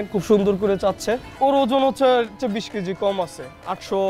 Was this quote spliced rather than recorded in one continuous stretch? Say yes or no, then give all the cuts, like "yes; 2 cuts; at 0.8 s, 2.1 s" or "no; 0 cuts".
yes; 1 cut; at 1.3 s